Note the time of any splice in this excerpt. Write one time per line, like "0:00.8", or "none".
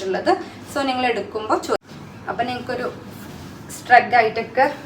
0:01.8